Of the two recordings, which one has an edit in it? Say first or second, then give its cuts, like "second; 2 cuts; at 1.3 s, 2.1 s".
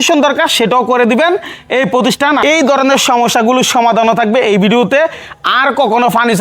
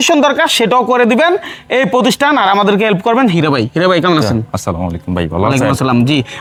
first; 1 cut; at 2.4 s